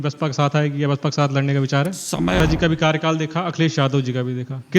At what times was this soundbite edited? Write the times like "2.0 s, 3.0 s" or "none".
2.4 s